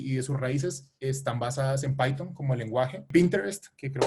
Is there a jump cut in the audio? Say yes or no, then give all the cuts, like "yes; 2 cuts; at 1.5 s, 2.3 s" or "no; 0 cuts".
yes; 1 cut; at 3.1 s